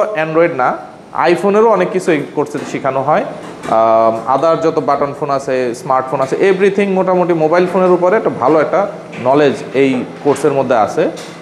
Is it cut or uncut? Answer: uncut